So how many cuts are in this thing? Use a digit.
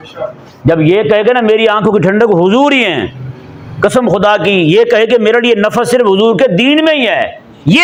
0